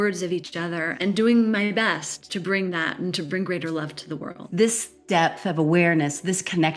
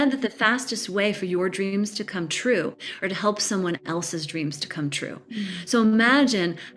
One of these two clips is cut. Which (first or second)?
first